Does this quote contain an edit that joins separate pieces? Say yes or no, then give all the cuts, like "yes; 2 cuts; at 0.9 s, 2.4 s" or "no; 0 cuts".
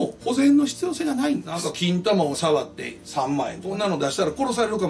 yes; 2 cuts; at 1.6 s, 3.8 s